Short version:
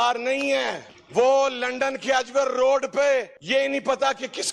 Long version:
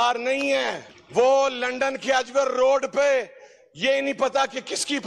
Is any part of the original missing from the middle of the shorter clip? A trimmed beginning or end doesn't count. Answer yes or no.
yes